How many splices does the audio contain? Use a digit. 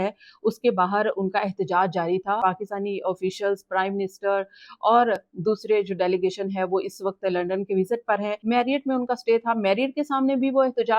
2